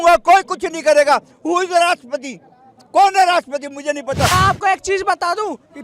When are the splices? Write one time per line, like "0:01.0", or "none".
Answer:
0:04.3